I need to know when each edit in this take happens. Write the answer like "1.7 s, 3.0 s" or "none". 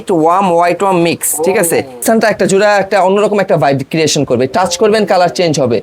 2.0 s